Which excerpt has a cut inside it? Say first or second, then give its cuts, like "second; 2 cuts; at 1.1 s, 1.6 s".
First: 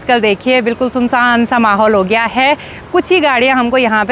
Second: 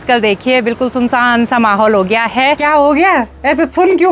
second; 1 cut; at 2.6 s